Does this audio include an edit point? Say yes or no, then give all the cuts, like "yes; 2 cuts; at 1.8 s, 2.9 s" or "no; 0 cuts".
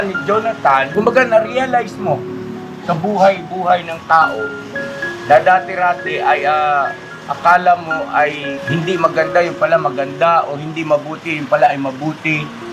yes; 2 cuts; at 0.9 s, 8.5 s